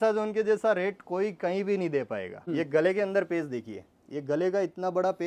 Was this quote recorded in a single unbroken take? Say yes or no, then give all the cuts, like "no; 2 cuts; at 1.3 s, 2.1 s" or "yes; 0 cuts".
no; 1 cut; at 2.4 s